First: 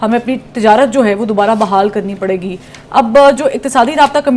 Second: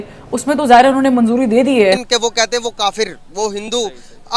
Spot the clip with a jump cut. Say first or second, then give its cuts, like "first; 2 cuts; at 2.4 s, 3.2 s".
second; 1 cut; at 2.0 s